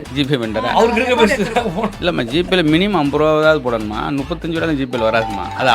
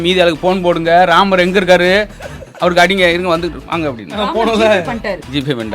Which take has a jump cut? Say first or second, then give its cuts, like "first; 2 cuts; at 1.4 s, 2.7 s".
second; 1 cut; at 4.2 s